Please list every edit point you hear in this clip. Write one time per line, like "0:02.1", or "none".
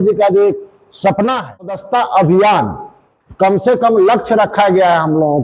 0:01.8